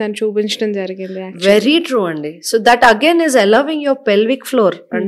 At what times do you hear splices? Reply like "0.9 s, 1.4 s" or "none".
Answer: none